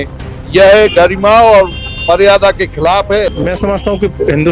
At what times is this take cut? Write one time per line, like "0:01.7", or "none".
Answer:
0:03.3

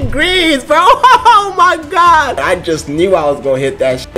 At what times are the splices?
0:02.4

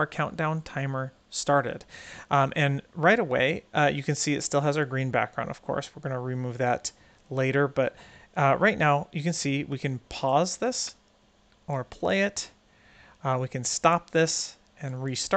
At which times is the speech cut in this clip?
none

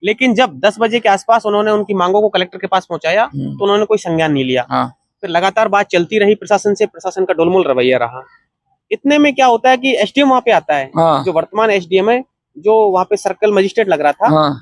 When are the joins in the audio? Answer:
none

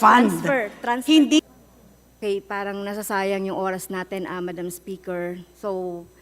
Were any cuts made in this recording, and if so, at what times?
0:01.4

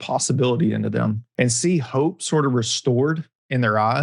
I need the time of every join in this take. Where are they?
0:01.2

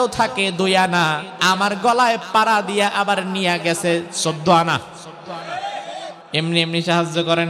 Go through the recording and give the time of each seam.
0:01.3
0:06.2

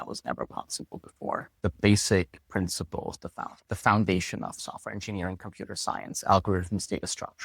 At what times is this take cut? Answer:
0:01.5

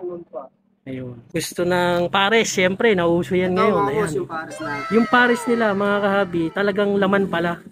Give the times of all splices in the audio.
0:01.2

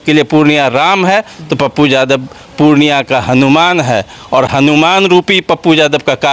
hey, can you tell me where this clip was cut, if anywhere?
none

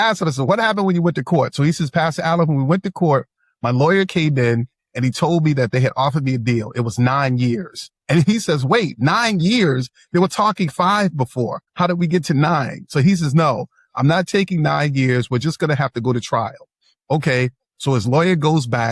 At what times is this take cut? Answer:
0:11.6

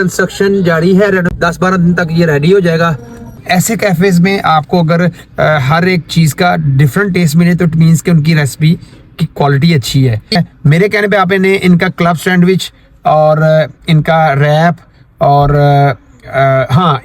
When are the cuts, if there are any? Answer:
0:03.3
0:10.4

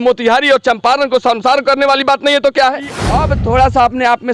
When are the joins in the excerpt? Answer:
0:03.0

